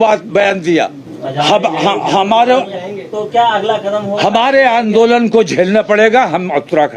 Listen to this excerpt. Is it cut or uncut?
uncut